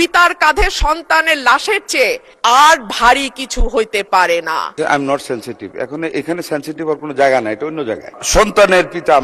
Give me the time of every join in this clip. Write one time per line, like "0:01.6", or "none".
0:02.3
0:04.8
0:08.1